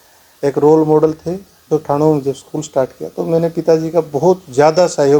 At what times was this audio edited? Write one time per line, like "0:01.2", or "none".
0:01.7